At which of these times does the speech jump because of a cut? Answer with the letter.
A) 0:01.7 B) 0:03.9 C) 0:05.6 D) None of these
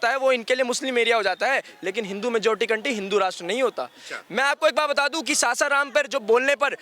D